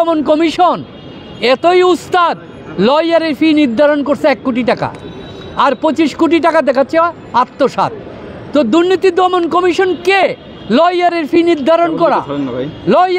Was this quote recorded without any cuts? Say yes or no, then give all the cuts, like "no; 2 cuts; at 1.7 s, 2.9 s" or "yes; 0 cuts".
yes; 0 cuts